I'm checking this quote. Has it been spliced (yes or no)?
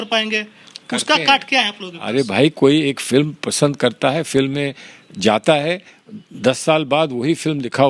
no